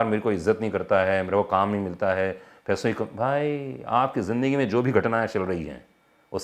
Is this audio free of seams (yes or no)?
yes